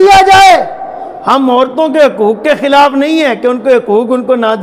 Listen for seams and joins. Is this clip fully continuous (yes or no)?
yes